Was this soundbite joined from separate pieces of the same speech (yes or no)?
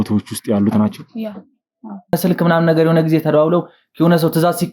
yes